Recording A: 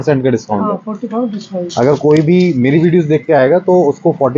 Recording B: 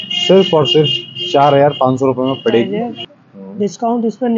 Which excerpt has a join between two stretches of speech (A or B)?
B